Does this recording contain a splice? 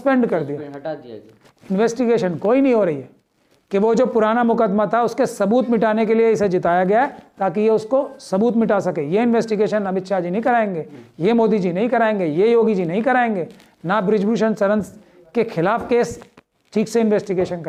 no; 0 cuts

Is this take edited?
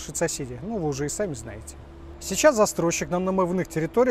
no; 0 cuts

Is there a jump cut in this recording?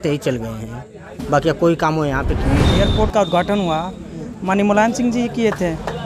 yes; 1 cut; at 2.6 s

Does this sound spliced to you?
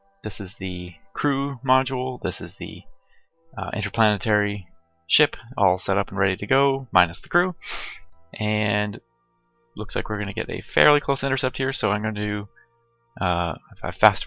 no; 0 cuts

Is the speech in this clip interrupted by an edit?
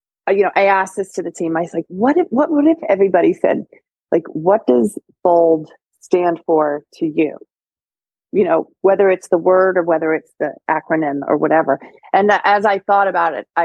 no; 0 cuts

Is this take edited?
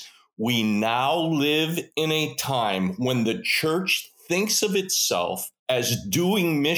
yes; 1 cut; at 5.5 s

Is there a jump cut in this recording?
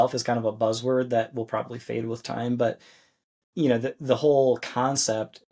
no; 0 cuts

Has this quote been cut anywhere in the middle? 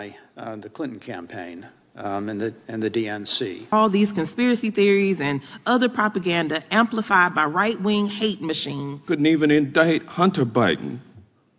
yes; 2 cuts; at 3.7 s, 8.9 s

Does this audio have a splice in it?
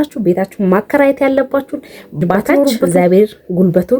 yes; 1 cut; at 2.8 s

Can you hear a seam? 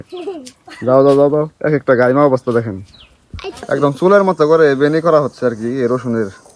yes; 1 cut; at 3.7 s

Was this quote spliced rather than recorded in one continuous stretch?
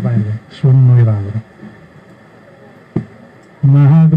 no; 0 cuts

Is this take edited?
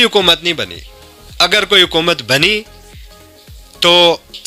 no; 0 cuts

